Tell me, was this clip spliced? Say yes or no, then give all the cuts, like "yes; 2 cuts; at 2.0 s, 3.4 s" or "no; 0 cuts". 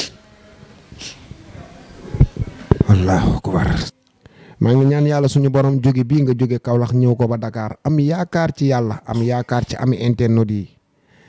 yes; 1 cut; at 3.9 s